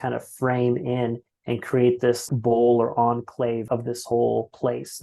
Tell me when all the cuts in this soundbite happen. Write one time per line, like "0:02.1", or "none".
0:02.2
0:03.6

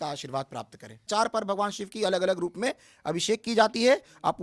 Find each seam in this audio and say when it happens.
0:01.0

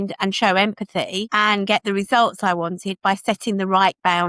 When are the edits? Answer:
none

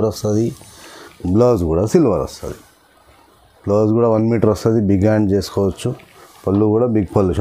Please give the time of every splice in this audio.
none

